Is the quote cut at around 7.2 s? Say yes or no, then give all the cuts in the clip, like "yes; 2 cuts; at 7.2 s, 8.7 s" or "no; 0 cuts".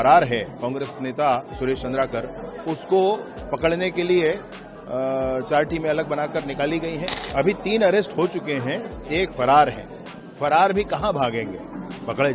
yes; 1 cut; at 7.2 s